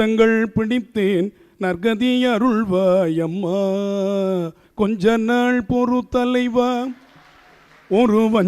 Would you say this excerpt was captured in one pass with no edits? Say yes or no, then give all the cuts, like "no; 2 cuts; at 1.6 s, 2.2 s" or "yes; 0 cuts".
no; 1 cut; at 4.6 s